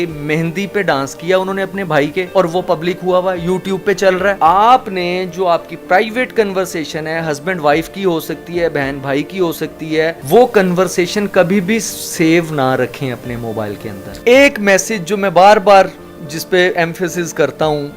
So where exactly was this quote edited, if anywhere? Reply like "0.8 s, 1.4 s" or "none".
4.4 s, 10.2 s, 14.2 s